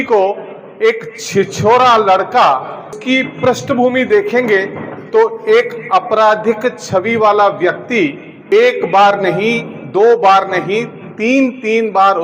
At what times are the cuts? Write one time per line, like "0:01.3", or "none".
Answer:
0:03.0
0:08.3